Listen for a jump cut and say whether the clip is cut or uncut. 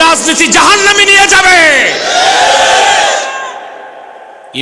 uncut